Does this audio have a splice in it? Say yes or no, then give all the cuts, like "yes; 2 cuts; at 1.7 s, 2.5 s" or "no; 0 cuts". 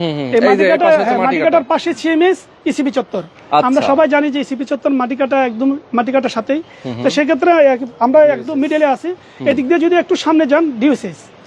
no; 0 cuts